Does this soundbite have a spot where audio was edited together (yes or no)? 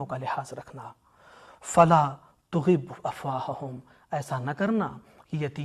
no